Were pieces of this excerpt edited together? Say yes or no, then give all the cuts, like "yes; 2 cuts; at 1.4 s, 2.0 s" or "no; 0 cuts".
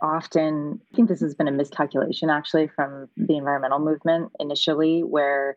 yes; 1 cut; at 0.9 s